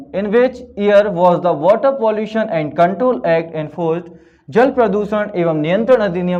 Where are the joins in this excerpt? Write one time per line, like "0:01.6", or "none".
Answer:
none